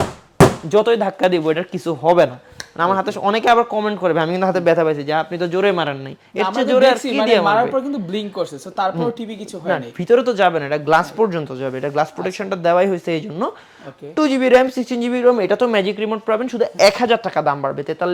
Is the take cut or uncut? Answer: uncut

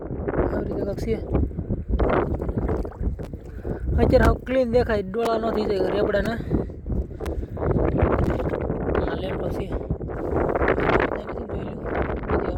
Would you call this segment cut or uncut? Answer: uncut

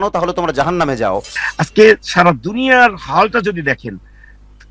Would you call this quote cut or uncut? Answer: cut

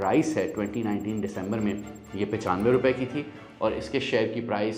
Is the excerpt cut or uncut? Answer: uncut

